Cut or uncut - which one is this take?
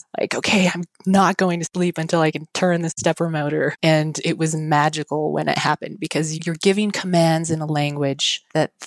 cut